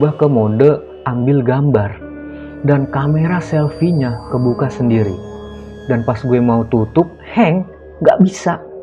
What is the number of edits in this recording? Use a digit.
0